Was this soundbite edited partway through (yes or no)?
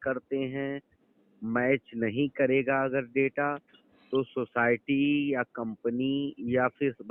no